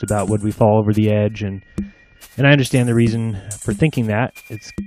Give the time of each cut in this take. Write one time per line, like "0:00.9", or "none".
0:03.8